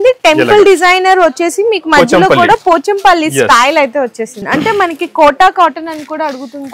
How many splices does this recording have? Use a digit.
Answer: 1